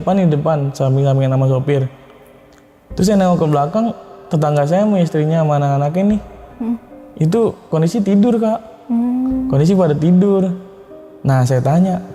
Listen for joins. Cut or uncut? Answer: uncut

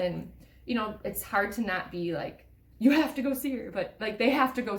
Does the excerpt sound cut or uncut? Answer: uncut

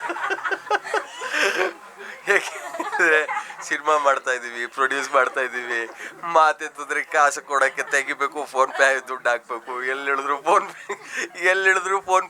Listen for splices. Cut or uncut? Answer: uncut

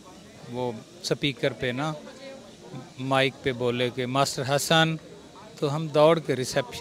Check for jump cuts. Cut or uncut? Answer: uncut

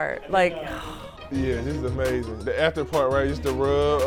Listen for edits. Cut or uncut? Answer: uncut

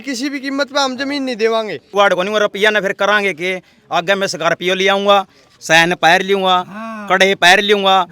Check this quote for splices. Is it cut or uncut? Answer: cut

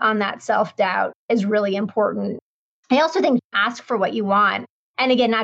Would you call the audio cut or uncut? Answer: cut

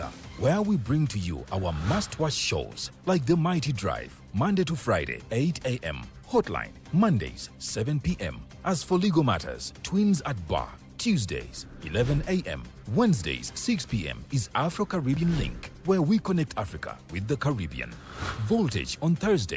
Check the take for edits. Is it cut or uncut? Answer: cut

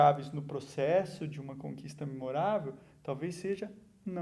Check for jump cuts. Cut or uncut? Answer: uncut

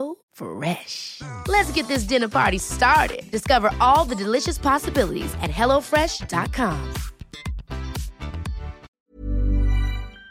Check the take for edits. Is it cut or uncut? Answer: cut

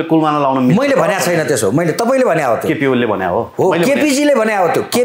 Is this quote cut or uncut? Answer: uncut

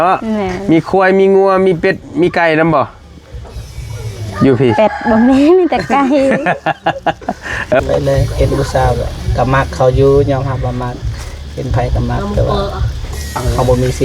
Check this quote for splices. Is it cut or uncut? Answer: cut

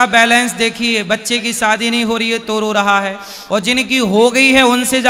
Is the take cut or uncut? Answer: uncut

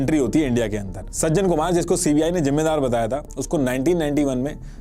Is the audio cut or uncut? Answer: cut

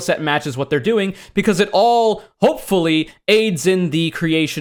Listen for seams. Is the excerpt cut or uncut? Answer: uncut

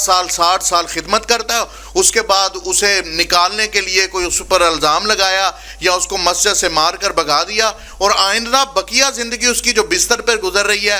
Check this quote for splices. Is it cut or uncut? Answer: uncut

